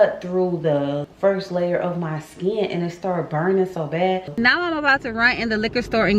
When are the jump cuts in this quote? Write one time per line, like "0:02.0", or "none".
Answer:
0:01.1
0:04.4